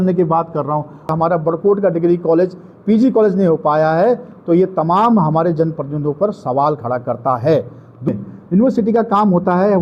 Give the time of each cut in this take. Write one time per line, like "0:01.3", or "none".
0:01.1
0:08.1